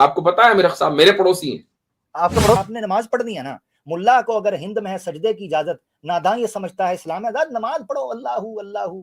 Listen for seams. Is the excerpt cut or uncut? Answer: cut